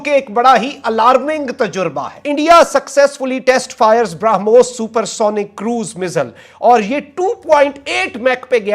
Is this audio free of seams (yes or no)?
no